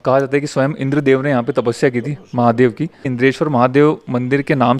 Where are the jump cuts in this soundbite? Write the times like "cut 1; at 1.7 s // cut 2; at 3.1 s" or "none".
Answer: cut 1; at 3.1 s